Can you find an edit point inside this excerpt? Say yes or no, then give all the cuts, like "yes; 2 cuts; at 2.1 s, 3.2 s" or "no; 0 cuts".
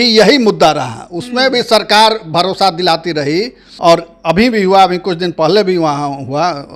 yes; 1 cut; at 3.6 s